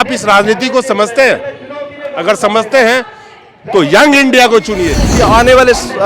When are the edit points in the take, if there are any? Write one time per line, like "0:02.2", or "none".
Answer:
0:05.1